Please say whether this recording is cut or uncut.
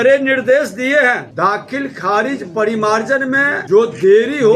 cut